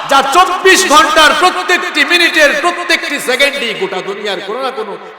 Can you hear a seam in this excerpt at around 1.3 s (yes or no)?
no